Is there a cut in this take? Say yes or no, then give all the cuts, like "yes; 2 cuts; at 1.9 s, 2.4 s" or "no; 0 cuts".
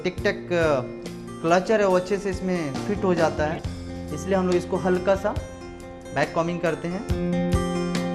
no; 0 cuts